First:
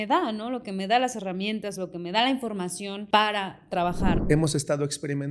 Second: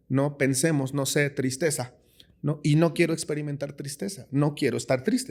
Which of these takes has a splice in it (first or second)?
first